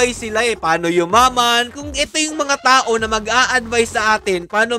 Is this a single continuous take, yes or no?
no